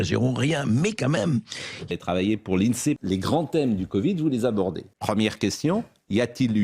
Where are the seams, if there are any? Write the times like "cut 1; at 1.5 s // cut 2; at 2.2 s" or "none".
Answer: cut 1; at 1.7 s // cut 2; at 3.0 s // cut 3; at 4.9 s